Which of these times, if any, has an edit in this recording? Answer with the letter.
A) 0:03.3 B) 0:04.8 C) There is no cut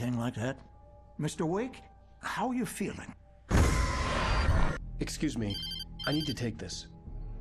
B